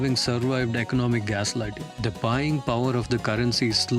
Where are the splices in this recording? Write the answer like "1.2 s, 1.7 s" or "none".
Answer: 1.9 s